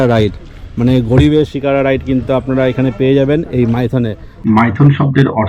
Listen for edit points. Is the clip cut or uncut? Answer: cut